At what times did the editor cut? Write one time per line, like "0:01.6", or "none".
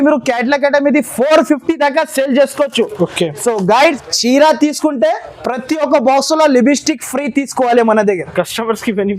0:04.0

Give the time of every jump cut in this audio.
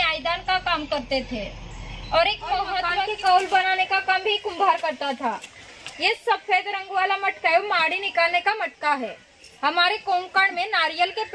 0:03.0

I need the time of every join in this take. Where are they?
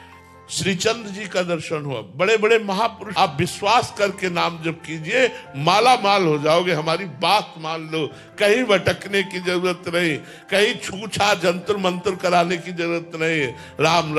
0:03.1

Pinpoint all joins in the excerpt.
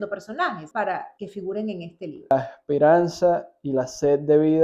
0:01.0
0:02.3

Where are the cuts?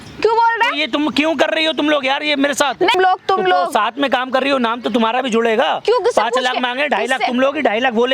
0:02.9

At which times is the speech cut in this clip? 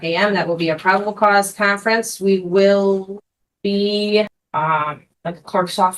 0:04.4

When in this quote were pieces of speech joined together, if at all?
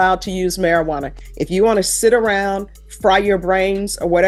none

